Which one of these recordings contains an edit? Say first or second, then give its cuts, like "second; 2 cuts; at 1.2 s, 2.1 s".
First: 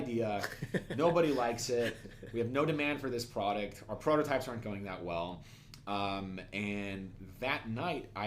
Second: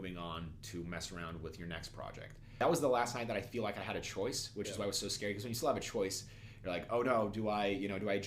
second; 1 cut; at 2.6 s